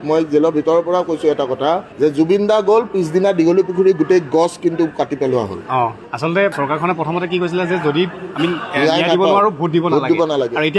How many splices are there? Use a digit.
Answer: 1